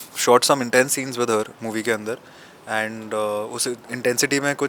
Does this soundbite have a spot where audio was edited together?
no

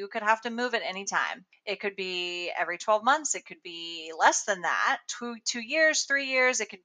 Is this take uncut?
yes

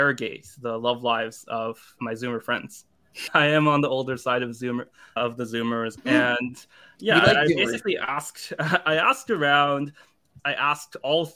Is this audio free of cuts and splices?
no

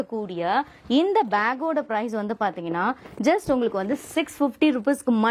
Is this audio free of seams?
yes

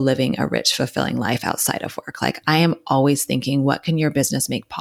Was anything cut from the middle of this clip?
no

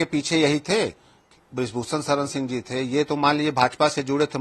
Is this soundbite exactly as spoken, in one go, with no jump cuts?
no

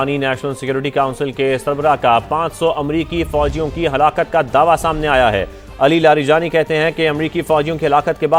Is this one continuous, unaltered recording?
yes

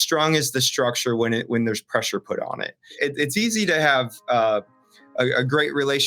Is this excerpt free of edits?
no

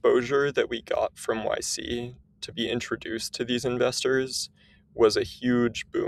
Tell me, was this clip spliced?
no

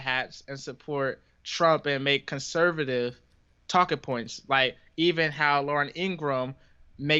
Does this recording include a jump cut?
no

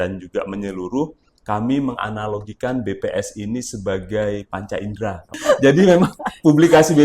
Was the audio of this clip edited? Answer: yes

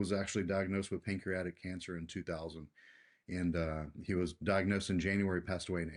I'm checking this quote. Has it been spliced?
no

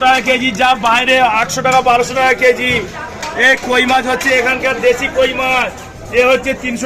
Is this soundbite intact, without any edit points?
yes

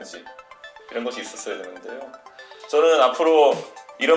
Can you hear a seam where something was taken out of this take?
no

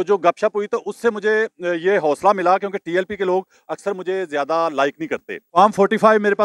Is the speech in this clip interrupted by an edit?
yes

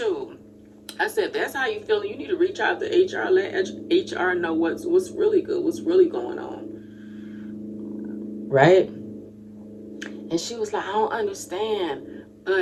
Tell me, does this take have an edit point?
no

